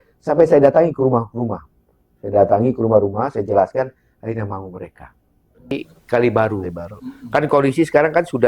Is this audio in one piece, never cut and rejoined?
no; 1 cut; at 5.7 s

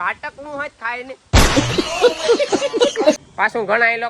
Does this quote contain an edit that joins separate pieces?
yes; 3 cuts; at 1.2 s, 2.6 s, 3.2 s

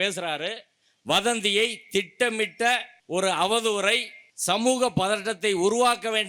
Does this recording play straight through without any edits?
no; 1 cut; at 2.9 s

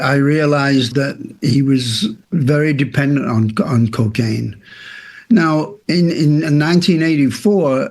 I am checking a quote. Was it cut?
yes; 1 cut; at 2.2 s

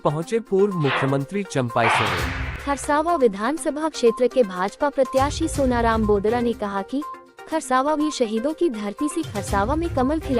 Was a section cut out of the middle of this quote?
yes; 1 cut; at 2.5 s

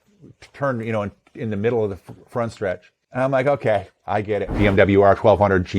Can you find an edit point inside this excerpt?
yes; 2 cuts; at 3.0 s, 4.6 s

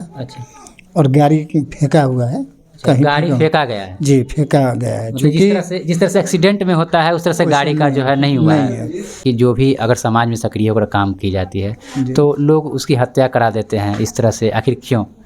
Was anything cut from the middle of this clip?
yes; 1 cut; at 9.1 s

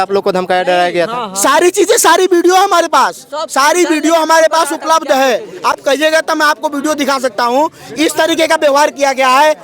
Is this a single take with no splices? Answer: yes; 0 cuts

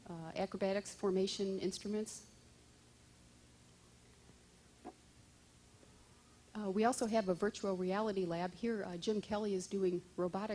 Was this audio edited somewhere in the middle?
yes; 1 cut; at 7.2 s

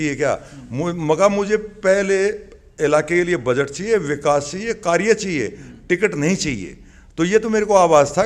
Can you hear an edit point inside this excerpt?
no; 0 cuts

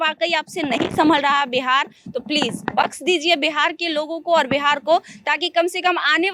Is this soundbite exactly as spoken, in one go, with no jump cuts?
yes; 0 cuts

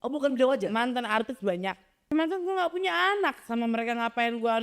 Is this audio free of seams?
no; 1 cut; at 1.9 s

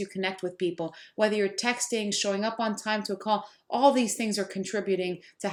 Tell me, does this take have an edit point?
no; 0 cuts

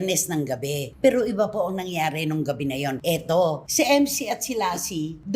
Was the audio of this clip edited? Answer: yes; 1 cut; at 0.9 s

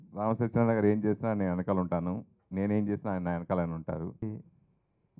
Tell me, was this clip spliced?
yes; 1 cut; at 4.2 s

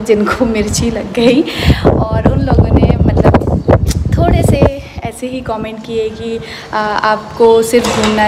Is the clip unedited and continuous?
yes; 0 cuts

